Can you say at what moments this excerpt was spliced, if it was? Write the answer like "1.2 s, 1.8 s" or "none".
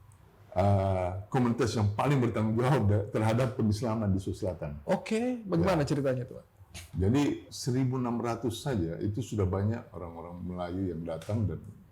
none